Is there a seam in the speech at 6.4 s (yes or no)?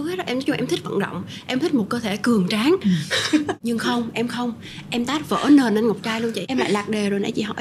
yes